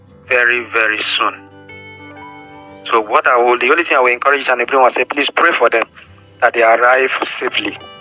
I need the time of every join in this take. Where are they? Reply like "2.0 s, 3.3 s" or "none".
1.4 s, 2.9 s